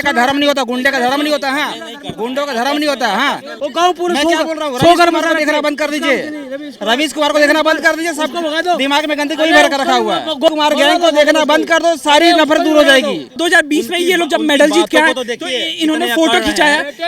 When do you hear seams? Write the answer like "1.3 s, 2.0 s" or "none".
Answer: 3.5 s, 10.5 s, 13.3 s